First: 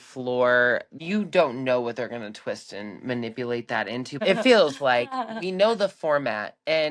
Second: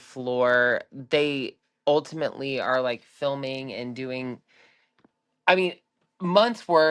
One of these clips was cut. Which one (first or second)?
first